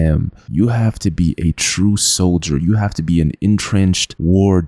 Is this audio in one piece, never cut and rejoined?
yes; 0 cuts

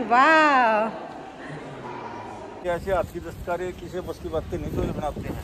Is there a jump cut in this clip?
yes; 1 cut; at 2.7 s

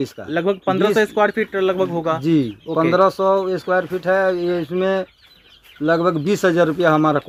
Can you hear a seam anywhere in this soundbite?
no; 0 cuts

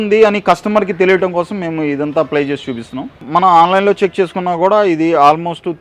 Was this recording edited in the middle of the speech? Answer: yes; 1 cut; at 3.2 s

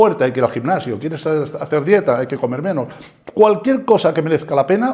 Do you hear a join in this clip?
no; 0 cuts

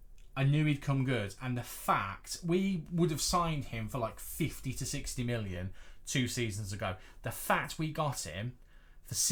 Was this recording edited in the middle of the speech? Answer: no; 0 cuts

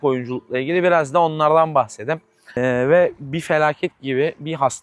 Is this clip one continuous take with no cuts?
no; 1 cut; at 2.6 s

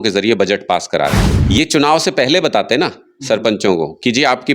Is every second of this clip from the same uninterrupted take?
no; 1 cut; at 1.3 s

